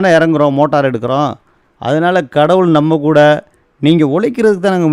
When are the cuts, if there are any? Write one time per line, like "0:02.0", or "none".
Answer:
0:01.2